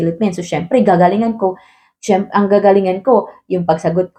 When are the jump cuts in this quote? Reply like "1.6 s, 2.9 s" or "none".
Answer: none